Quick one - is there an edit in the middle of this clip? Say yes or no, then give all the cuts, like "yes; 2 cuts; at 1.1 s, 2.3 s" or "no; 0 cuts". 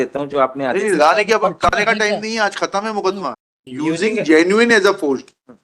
yes; 1 cut; at 3.4 s